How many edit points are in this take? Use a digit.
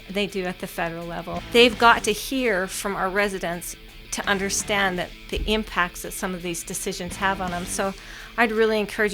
1